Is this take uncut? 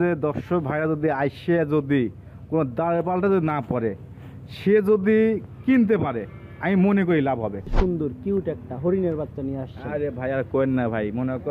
no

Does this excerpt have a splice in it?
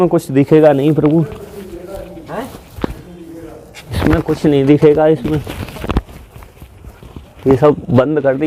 no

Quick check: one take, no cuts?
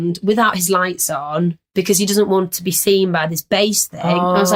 yes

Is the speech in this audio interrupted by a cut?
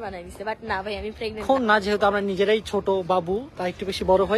yes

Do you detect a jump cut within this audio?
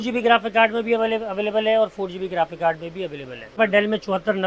yes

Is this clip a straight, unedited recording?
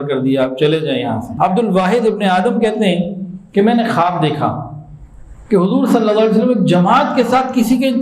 no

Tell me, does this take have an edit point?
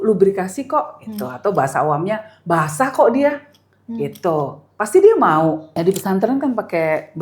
yes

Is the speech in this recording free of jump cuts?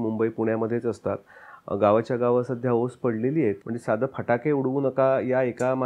no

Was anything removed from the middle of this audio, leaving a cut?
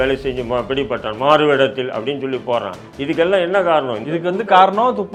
no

